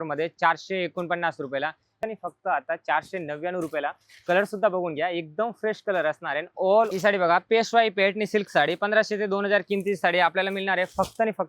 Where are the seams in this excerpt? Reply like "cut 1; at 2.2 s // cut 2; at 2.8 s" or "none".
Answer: cut 1; at 2.0 s // cut 2; at 6.9 s